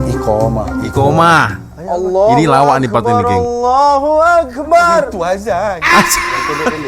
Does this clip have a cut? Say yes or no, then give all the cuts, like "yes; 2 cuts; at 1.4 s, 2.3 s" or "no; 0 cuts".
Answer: no; 0 cuts